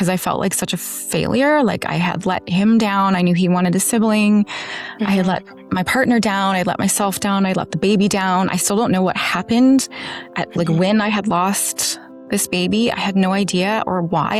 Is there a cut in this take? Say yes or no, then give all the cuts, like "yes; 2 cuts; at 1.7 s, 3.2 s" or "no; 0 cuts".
no; 0 cuts